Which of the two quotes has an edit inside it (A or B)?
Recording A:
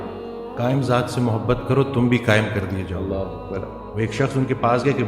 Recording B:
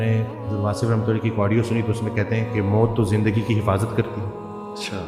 A